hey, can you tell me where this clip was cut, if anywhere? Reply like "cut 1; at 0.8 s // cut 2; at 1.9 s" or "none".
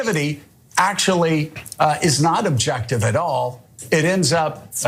none